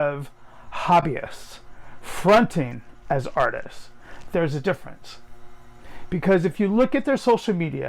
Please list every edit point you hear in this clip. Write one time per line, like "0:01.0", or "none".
none